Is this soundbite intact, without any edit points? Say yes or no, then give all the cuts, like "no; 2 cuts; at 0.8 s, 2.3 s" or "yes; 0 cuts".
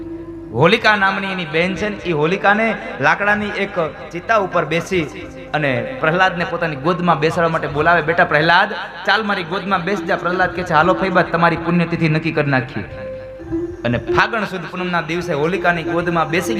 no; 1 cut; at 13.4 s